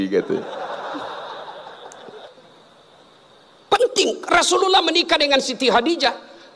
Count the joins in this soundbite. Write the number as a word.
one